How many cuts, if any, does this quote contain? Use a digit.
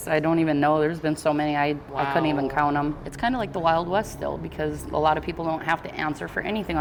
0